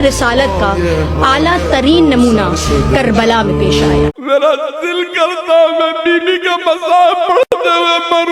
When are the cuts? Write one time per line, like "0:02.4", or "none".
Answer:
0:04.1